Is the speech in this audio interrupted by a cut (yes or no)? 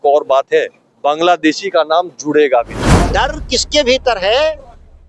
yes